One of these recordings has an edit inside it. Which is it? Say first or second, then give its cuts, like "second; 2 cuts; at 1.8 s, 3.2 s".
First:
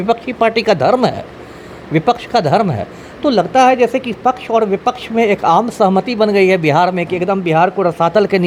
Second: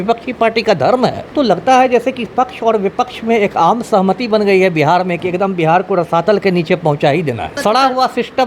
second; 2 cuts; at 1.2 s, 7.6 s